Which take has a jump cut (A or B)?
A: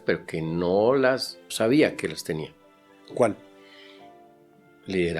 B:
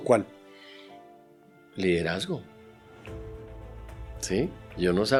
A